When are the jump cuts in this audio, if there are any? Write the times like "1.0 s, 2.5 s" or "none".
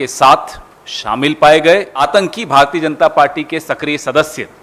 2.0 s

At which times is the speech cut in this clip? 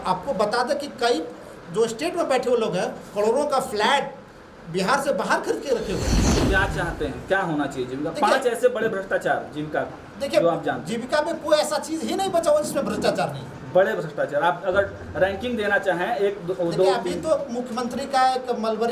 6.4 s

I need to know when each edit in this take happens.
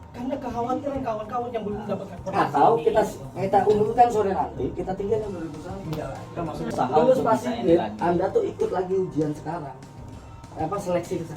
6.7 s

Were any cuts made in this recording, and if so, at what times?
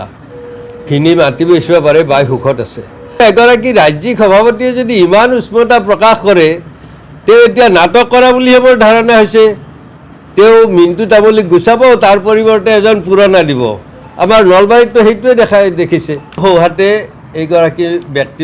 3.2 s, 16.3 s

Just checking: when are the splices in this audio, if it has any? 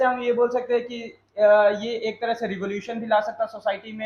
none

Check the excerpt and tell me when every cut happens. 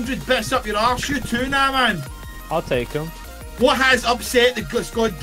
none

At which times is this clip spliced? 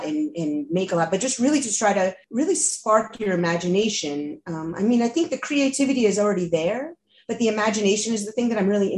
2.2 s

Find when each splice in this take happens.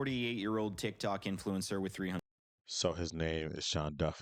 none

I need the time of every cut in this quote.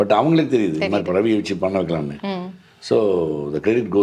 none

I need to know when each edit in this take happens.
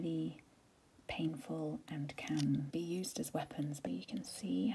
2.7 s, 3.8 s

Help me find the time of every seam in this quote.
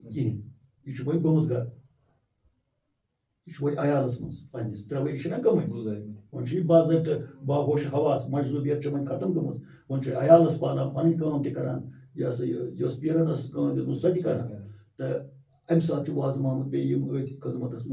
none

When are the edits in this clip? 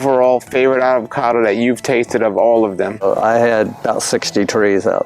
3.0 s

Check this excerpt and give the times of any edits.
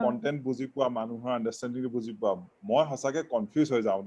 none

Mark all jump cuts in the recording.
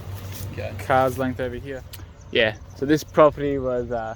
1.6 s

